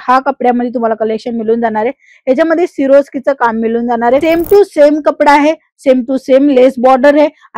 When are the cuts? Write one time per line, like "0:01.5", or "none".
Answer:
0:04.2

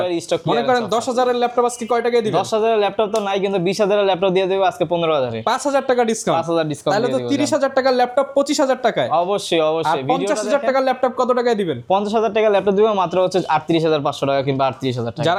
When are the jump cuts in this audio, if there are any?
none

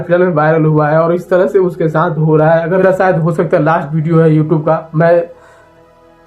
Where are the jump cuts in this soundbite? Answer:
0:02.8

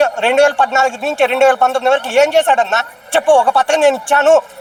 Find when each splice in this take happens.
none

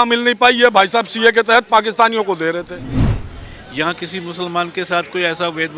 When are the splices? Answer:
0:03.0

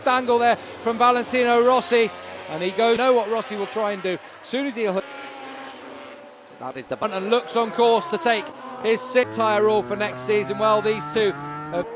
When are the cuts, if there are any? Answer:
none

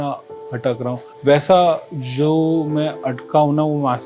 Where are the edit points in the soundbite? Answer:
0:01.1

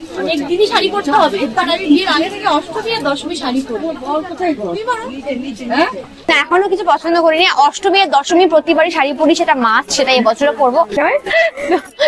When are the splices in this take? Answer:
0:06.2
0:11.0

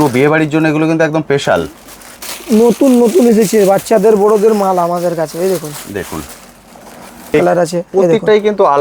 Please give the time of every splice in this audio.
0:07.3

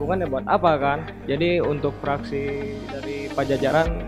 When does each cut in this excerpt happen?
none

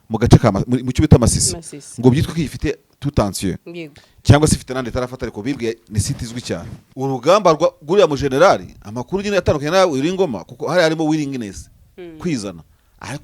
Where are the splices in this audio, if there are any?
0:06.8

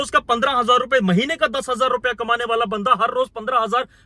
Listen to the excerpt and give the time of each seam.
none

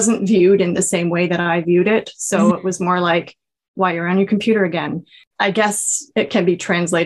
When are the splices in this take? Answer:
0:05.2

